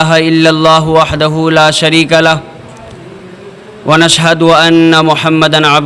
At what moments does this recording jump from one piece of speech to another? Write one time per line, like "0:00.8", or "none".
none